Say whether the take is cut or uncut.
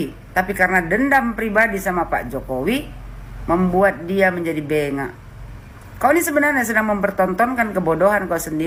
uncut